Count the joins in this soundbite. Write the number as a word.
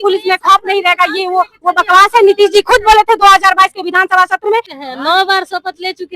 one